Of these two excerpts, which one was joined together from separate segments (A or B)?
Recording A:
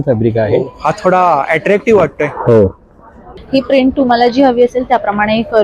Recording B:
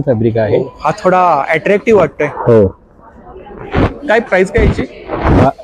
A